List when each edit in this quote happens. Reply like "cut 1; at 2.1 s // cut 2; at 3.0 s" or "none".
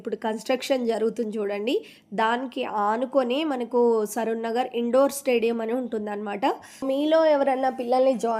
cut 1; at 6.8 s